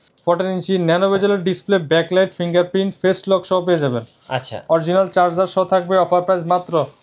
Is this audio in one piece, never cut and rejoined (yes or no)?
yes